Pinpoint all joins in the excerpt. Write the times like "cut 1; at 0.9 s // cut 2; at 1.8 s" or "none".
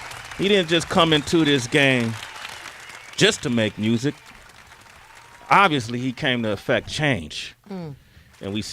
cut 1; at 2.2 s